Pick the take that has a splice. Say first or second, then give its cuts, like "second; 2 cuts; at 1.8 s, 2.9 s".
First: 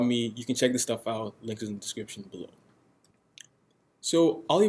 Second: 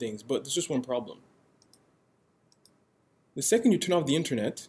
first; 1 cut; at 3.1 s